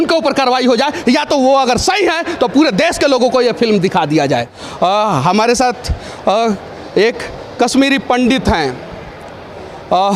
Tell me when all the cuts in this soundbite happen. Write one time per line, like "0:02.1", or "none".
0:04.6